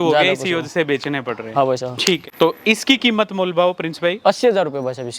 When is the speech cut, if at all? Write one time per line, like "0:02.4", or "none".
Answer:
0:02.2